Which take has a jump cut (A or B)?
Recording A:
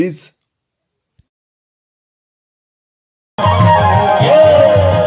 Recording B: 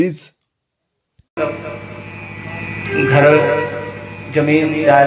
B